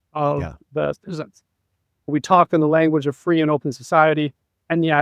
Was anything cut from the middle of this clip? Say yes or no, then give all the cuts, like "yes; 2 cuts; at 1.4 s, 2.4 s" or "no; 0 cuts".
yes; 1 cut; at 2.1 s